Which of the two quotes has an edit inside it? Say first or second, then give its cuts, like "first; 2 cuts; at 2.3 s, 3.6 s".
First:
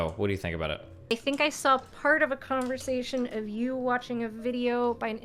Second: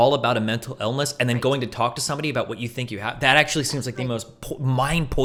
first; 1 cut; at 1.1 s